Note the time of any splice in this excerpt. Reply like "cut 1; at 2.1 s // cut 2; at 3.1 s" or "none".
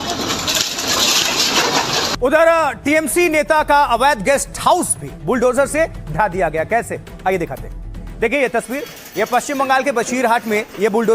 cut 1; at 2.1 s